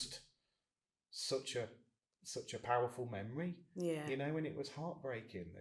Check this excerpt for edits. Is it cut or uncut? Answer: uncut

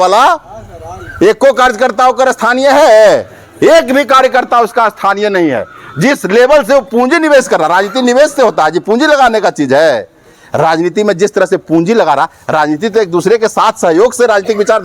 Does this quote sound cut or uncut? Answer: uncut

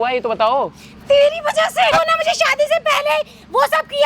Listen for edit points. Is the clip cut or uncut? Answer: cut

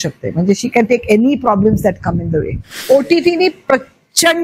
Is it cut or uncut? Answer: cut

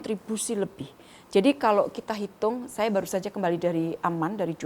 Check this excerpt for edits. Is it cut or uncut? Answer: uncut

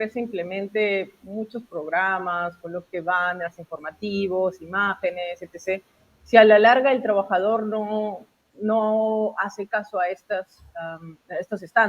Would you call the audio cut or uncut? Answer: uncut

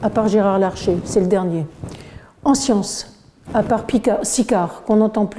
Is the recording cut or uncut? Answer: uncut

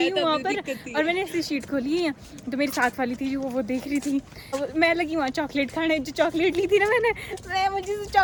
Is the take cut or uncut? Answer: uncut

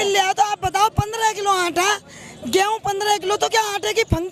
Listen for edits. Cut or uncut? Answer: uncut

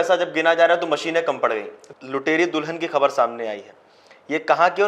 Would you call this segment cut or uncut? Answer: cut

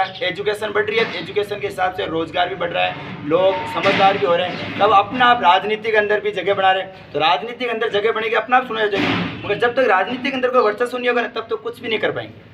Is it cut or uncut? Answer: uncut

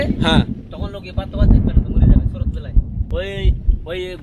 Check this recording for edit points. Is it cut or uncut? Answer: cut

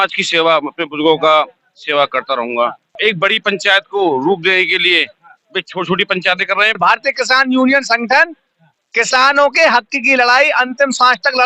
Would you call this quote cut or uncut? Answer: cut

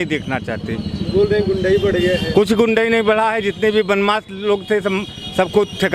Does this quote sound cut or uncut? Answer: uncut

